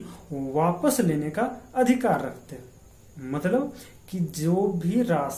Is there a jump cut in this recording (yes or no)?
no